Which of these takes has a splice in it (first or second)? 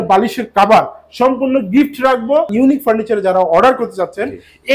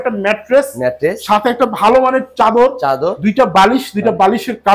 first